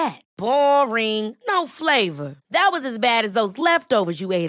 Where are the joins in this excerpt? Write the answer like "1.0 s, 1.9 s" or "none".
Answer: none